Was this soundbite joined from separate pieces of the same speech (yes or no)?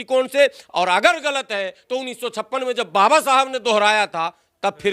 no